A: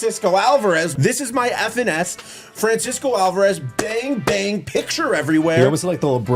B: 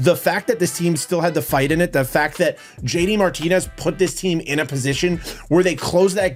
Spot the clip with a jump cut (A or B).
A